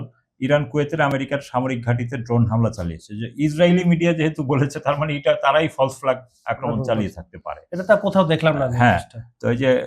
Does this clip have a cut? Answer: no; 0 cuts

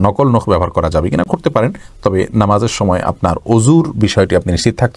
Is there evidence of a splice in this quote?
no; 0 cuts

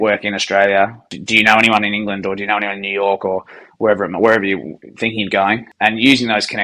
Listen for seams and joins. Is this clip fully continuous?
no; 2 cuts; at 1.1 s, 5.7 s

